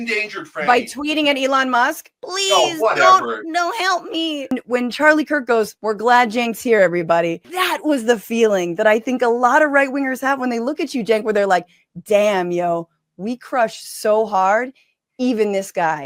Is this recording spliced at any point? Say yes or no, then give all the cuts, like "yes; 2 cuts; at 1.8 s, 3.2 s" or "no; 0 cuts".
yes; 3 cuts; at 4.5 s, 5.8 s, 7.5 s